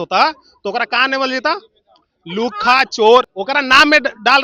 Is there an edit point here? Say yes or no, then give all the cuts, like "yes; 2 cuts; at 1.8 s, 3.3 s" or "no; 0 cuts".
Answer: no; 0 cuts